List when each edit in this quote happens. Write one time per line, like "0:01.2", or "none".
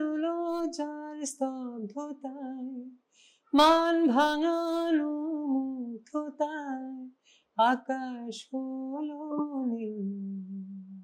none

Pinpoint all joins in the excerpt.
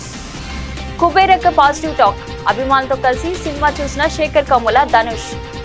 none

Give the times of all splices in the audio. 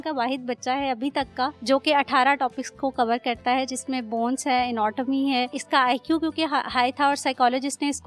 0:01.6
0:05.6

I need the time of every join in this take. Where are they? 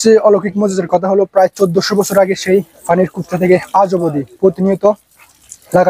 none

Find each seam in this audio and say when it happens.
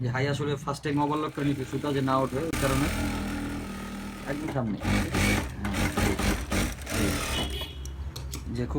none

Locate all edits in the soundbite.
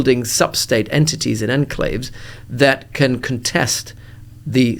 none

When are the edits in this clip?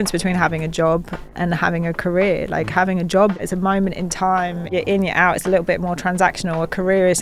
0:01.2
0:03.4
0:04.7

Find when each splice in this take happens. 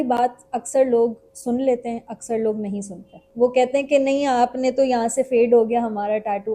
0:03.2

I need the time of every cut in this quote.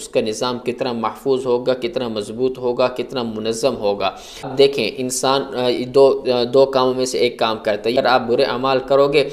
0:04.5
0:07.9

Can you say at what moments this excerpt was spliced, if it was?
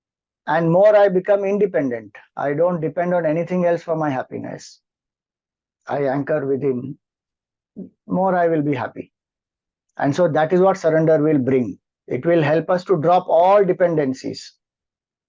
none

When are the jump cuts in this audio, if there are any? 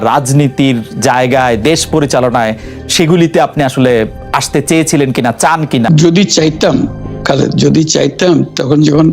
0:05.9

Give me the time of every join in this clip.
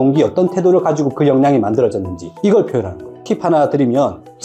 0:03.2

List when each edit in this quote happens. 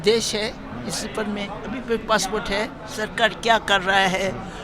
0:02.8

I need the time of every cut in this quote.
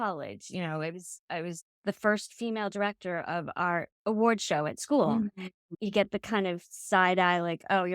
0:05.6

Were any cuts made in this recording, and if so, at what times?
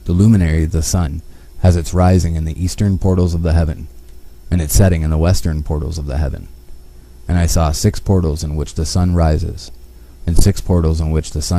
none

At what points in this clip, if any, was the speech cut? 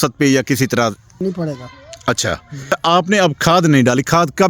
0:01.2
0:02.7

